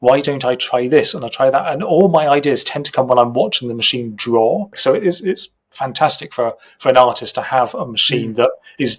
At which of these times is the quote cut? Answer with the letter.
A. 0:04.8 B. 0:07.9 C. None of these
A